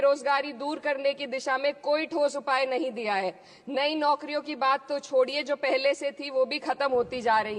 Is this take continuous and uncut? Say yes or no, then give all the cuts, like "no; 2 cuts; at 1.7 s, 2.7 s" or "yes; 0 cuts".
yes; 0 cuts